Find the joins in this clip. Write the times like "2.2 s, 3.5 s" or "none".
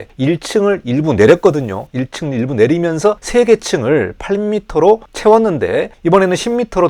none